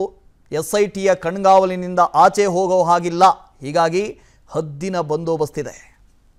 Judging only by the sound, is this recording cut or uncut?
uncut